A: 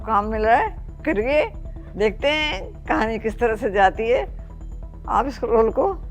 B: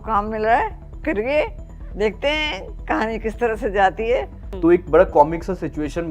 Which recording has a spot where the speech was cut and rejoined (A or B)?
B